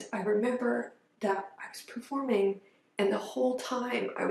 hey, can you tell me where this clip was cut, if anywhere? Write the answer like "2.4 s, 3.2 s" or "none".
none